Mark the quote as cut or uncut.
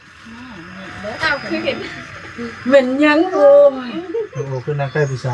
uncut